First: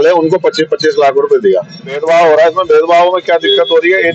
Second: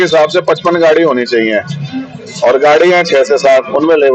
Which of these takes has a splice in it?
first; 1 cut; at 2.0 s

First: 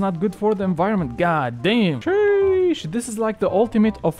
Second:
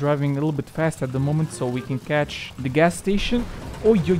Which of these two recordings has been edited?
second; 1 cut; at 2.4 s

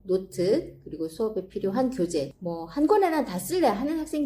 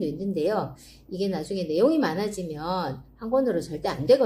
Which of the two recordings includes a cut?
first; 1 cut; at 2.3 s

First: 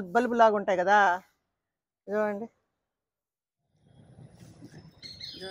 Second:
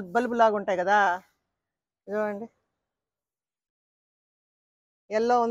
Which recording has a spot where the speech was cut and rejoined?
first; 1 cut; at 3.8 s

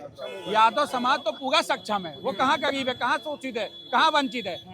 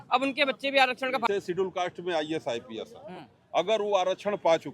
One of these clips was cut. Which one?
second; 1 cut; at 1.3 s

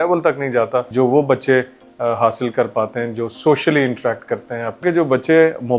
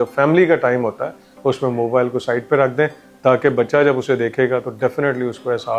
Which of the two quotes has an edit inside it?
first; 2 cuts; at 0.9 s, 4.8 s

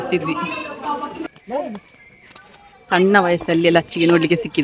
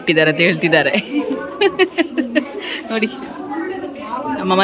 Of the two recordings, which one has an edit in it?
first; 1 cut; at 1.3 s

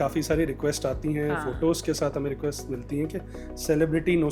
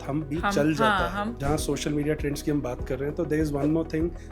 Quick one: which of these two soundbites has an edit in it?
second; 1 cut; at 1.4 s

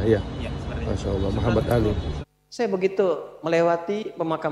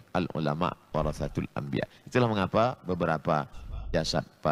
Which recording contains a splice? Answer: first; 1 cut; at 2.1 s

